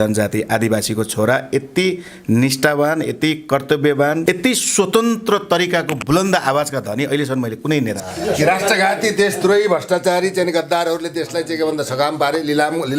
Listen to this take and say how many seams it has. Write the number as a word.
two